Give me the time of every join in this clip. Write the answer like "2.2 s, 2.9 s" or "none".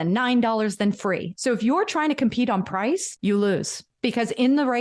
1.3 s, 3.1 s, 3.8 s